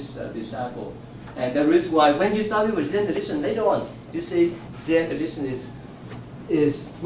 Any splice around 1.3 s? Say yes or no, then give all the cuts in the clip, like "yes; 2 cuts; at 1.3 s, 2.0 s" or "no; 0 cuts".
no; 0 cuts